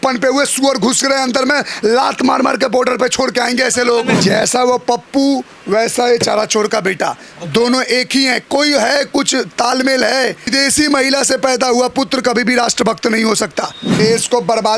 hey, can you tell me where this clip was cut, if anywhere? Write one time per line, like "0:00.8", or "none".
0:04.2
0:10.5
0:13.8